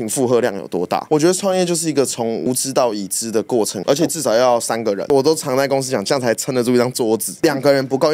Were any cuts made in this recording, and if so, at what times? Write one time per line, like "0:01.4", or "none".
0:01.1
0:03.8
0:05.0